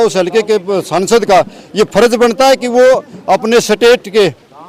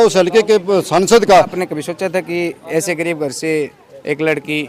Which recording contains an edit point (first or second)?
second